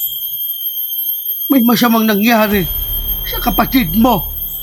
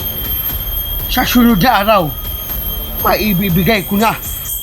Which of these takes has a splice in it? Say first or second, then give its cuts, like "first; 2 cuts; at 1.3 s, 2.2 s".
second; 1 cut; at 1.1 s